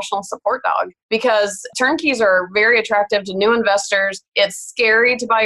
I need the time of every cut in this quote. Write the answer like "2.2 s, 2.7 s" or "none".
1.0 s, 1.7 s, 4.2 s